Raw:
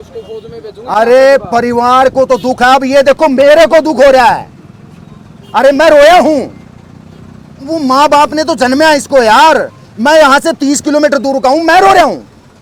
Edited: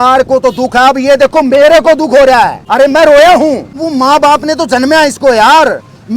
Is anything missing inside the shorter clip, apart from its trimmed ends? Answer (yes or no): yes